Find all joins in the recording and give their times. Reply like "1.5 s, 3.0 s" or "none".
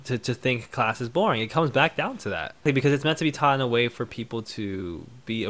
2.6 s